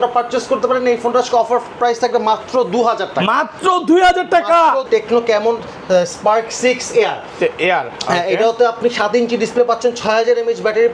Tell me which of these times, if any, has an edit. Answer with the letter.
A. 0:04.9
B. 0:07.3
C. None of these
A